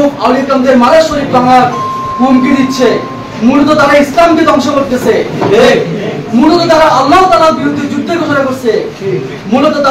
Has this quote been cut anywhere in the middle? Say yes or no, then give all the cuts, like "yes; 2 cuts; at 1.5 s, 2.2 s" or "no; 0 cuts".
no; 0 cuts